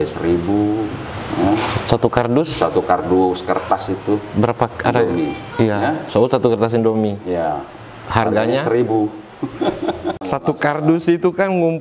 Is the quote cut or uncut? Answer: cut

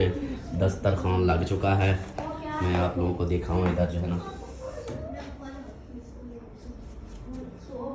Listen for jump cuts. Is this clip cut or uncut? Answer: uncut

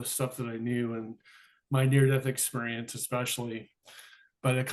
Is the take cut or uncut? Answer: uncut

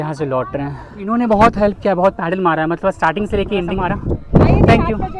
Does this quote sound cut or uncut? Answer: cut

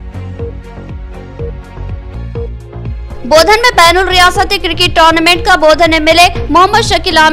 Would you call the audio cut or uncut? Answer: cut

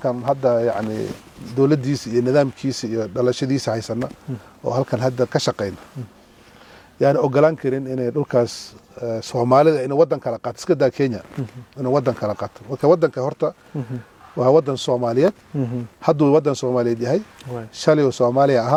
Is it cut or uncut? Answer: uncut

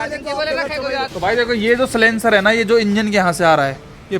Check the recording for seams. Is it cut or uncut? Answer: cut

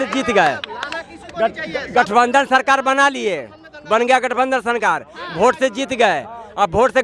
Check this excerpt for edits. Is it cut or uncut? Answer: uncut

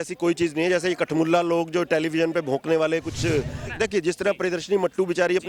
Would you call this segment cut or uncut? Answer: cut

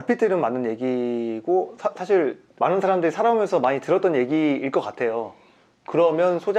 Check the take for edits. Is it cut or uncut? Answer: cut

